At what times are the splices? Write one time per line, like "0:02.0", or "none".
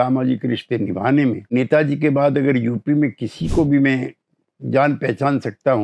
0:01.4